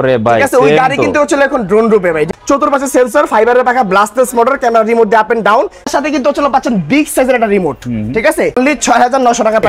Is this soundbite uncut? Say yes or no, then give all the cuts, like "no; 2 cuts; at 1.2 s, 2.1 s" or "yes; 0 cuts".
no; 3 cuts; at 2.3 s, 5.8 s, 8.5 s